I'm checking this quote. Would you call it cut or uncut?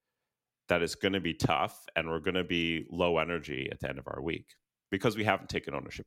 uncut